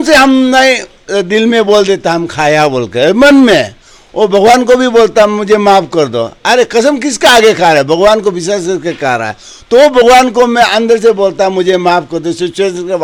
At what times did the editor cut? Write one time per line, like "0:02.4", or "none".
none